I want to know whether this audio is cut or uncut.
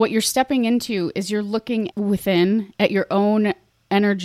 cut